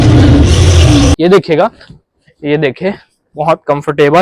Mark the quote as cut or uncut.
cut